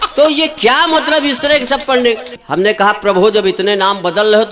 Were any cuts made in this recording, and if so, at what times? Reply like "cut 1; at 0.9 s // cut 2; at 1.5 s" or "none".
cut 1; at 2.3 s